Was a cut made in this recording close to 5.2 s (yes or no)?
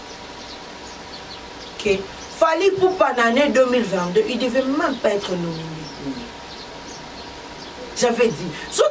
no